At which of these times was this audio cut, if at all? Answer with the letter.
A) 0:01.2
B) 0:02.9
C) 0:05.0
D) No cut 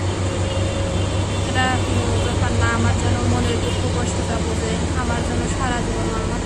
D